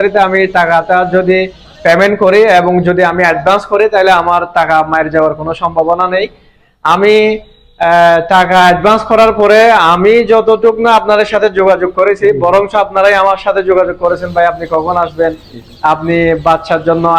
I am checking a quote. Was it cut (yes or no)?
no